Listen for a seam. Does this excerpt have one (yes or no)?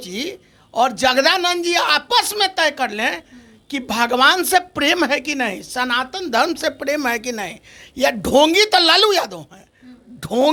no